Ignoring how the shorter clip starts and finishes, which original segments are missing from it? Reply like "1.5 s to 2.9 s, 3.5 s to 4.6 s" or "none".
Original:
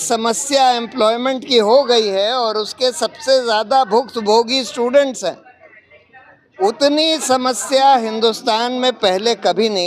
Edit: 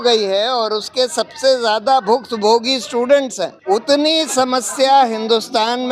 5.4 s to 6.5 s